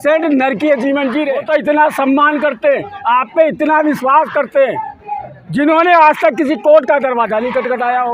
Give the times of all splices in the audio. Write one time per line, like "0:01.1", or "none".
0:01.4